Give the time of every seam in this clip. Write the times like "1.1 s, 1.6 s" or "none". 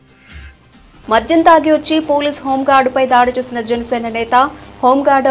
1.0 s